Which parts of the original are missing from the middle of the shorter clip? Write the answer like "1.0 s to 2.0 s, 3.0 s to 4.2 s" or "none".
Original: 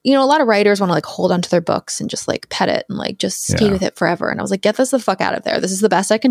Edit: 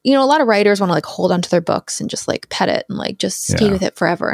none